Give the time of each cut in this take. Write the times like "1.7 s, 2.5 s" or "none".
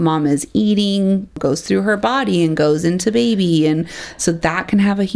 1.4 s